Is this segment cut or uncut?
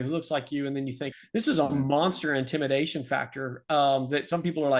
cut